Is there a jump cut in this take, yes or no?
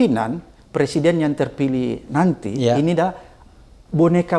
no